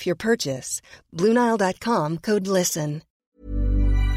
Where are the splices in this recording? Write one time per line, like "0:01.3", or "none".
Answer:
0:03.2